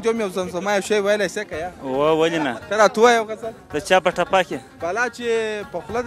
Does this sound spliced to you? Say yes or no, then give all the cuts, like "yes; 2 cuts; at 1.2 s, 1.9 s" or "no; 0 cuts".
no; 0 cuts